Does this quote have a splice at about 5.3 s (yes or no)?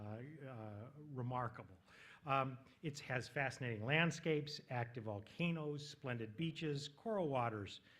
yes